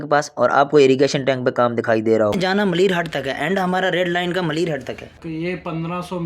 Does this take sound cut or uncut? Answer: cut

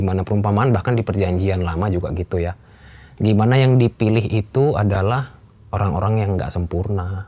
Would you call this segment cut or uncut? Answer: uncut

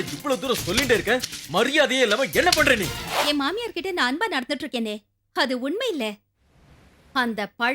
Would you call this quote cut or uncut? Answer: cut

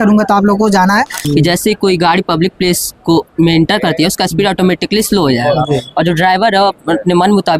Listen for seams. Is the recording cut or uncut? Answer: cut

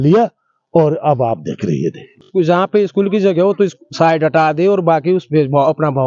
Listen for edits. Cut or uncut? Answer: cut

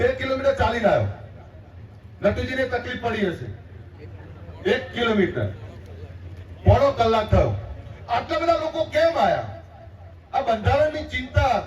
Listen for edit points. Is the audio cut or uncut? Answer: uncut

